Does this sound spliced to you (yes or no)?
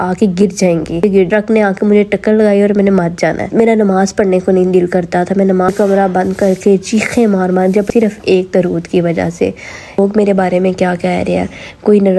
yes